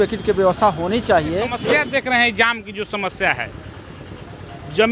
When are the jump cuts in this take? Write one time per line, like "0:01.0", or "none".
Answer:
0:01.6